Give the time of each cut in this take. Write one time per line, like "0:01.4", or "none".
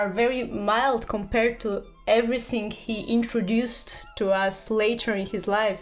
none